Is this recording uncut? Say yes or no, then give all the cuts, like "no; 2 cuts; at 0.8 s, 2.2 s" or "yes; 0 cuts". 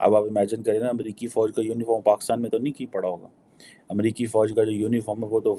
yes; 0 cuts